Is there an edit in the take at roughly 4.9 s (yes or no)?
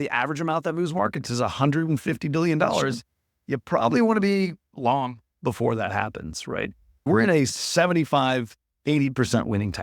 no